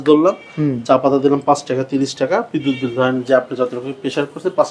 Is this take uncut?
yes; 0 cuts

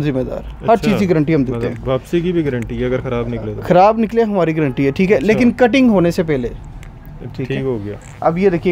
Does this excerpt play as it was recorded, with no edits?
yes; 0 cuts

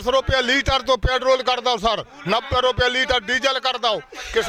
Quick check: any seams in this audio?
no; 0 cuts

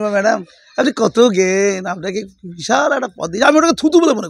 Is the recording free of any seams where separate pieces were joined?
yes; 0 cuts

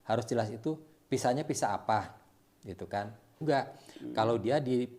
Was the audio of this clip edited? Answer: yes; 1 cut; at 3.4 s

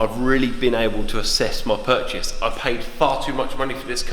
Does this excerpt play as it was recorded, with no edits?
yes; 0 cuts

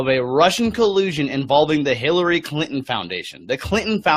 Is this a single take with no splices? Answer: no; 1 cut; at 2.7 s

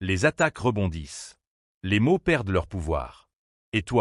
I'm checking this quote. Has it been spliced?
no; 0 cuts

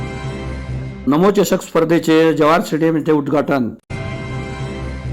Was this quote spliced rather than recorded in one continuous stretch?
yes; 1 cut; at 1.0 s

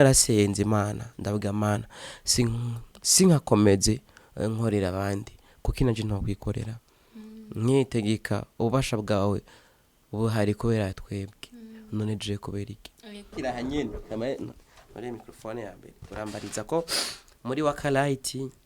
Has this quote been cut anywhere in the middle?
yes; 1 cut; at 13.2 s

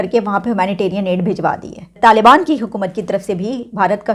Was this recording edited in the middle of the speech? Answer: yes; 1 cut; at 1.9 s

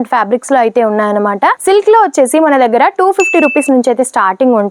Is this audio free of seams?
yes; 0 cuts

